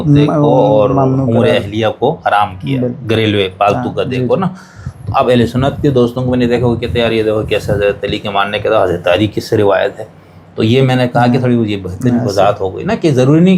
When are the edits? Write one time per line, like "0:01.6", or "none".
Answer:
none